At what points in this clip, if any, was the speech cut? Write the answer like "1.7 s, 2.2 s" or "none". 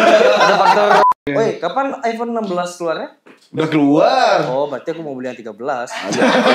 1.1 s